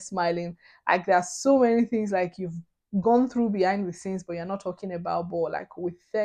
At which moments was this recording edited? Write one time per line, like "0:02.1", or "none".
none